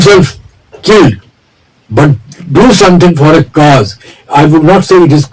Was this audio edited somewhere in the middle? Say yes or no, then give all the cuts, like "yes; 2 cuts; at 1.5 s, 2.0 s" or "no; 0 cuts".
no; 0 cuts